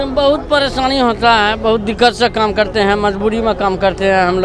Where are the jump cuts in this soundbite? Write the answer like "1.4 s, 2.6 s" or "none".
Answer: none